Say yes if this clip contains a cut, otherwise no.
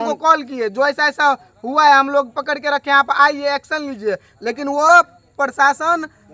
no